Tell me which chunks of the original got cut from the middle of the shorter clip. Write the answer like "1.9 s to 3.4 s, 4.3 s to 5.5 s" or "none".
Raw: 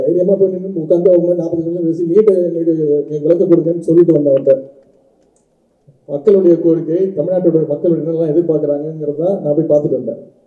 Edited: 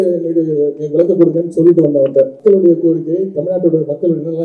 4.7 s to 6.2 s